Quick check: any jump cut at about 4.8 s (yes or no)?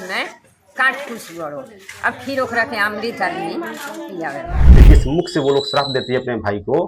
yes